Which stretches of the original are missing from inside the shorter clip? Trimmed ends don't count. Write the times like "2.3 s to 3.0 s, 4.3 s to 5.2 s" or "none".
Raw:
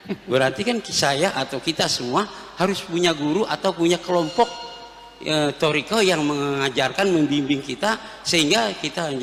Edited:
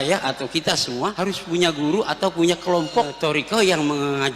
2.3 s to 2.6 s, 4.6 s to 5.5 s

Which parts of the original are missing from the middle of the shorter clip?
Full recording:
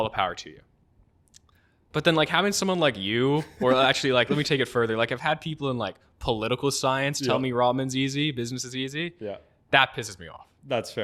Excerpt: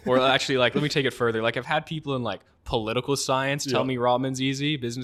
none

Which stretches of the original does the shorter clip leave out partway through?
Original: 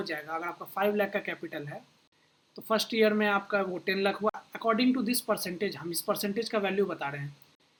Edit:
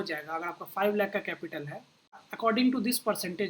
2.3 s to 4.5 s

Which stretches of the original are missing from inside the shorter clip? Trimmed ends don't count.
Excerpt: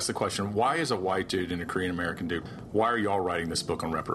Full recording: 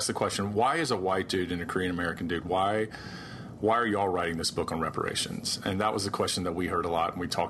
2.4 s to 3.3 s

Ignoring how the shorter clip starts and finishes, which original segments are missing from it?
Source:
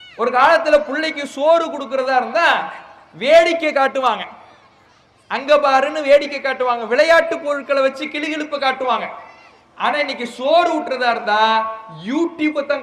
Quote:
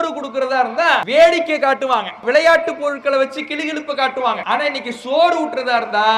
2.6 s to 3.2 s, 4.3 s to 6.8 s, 9.1 s to 9.8 s

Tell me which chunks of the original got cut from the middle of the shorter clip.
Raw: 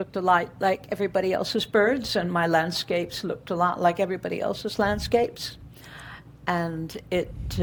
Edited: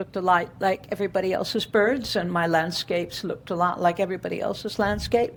none

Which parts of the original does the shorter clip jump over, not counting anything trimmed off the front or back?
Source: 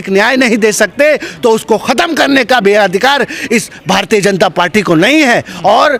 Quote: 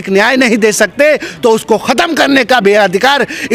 none

